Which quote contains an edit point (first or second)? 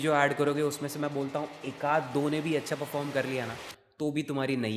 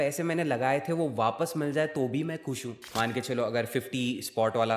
second